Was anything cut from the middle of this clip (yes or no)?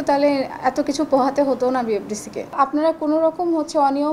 yes